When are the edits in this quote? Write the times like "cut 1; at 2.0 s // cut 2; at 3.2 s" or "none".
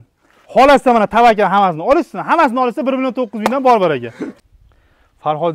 cut 1; at 4.2 s